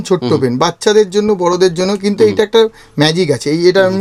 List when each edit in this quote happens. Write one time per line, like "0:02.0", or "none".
none